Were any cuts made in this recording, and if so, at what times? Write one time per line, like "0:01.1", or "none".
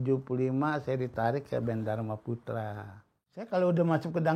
0:03.5

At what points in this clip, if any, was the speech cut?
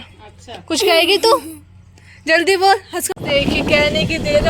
0:03.0

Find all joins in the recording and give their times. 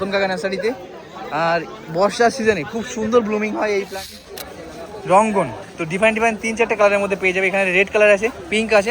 0:04.0

